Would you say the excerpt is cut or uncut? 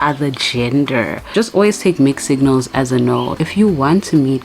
cut